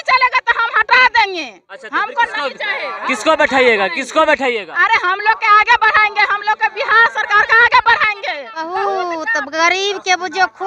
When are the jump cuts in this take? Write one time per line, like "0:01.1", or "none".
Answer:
0:08.5